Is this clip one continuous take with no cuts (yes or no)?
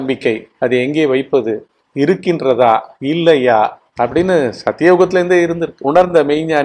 no